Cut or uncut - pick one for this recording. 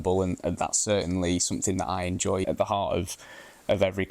cut